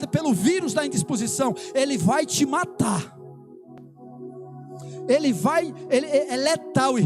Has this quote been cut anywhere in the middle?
no; 0 cuts

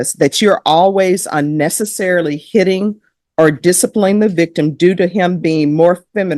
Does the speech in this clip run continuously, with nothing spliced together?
yes; 0 cuts

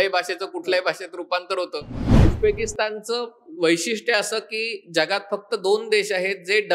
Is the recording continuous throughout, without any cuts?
no; 1 cut; at 2.2 s

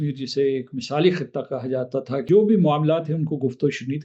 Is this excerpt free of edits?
no; 1 cut; at 2.3 s

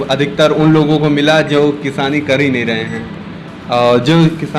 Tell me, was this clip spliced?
no; 0 cuts

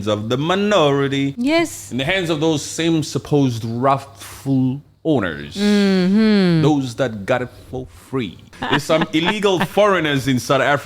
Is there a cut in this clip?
yes; 2 cuts; at 1.3 s, 8.6 s

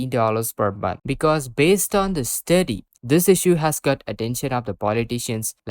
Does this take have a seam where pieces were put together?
yes; 2 cuts; at 1.0 s, 2.9 s

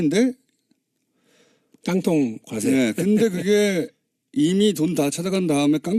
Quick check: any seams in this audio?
no; 0 cuts

